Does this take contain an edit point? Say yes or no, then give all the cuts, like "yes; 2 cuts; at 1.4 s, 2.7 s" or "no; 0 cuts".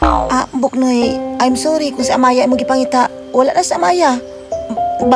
no; 0 cuts